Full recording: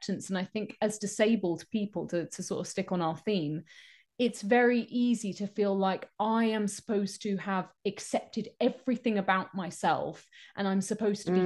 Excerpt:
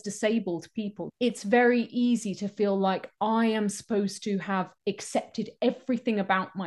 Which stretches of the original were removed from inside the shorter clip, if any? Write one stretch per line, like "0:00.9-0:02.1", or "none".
0:02.0-0:04.0